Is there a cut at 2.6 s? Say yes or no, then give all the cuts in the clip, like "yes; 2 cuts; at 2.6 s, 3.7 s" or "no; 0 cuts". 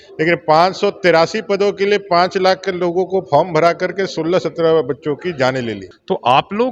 no; 1 cut; at 5.8 s